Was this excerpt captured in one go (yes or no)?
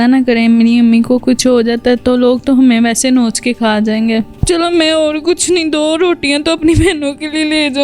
no